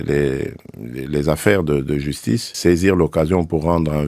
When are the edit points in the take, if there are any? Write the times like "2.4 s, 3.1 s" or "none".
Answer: 2.5 s